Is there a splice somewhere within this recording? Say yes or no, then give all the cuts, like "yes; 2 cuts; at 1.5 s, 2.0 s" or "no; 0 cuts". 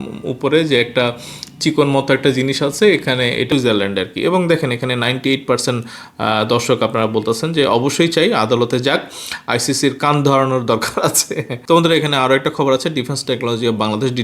yes; 2 cuts; at 3.5 s, 11.5 s